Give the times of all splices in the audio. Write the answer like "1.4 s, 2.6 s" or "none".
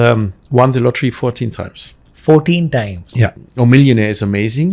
3.4 s